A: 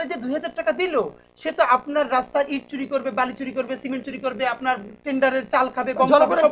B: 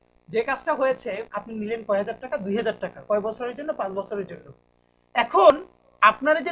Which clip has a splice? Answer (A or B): B